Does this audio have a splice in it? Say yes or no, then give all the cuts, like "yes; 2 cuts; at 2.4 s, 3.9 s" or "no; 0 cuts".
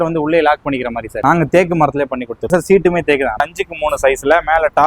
yes; 3 cuts; at 1.1 s, 2.5 s, 3.4 s